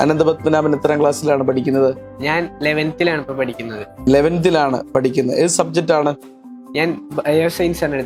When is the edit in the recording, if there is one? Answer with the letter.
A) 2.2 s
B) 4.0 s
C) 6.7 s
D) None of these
D